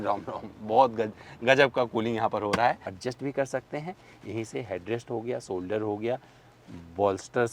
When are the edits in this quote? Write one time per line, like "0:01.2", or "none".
0:02.9